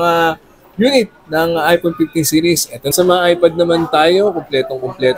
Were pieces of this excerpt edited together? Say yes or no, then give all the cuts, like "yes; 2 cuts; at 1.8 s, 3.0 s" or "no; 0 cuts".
yes; 1 cut; at 2.9 s